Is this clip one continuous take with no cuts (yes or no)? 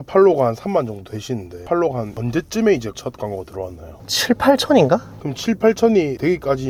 yes